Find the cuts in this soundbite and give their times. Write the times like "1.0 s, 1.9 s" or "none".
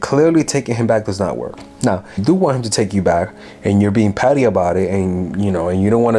2.2 s